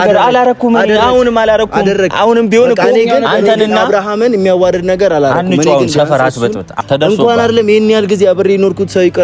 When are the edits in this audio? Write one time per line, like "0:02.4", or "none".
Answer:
0:06.8